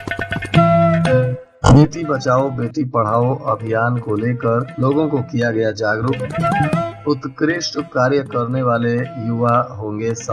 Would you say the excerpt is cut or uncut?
cut